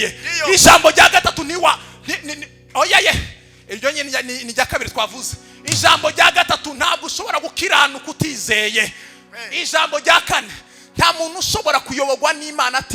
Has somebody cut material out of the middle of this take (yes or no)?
no